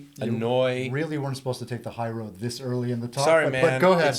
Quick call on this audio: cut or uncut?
uncut